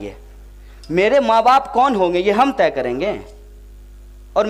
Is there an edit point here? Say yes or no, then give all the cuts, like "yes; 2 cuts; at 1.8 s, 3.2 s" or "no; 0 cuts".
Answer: no; 0 cuts